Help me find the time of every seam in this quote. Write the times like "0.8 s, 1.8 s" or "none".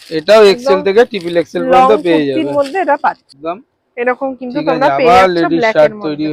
3.4 s